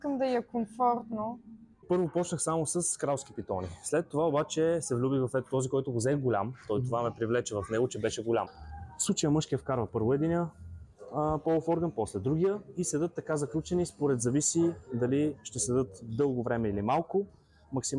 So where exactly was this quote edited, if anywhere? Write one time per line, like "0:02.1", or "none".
0:01.8
0:08.5